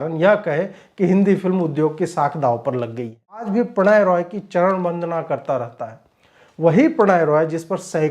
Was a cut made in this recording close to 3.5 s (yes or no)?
yes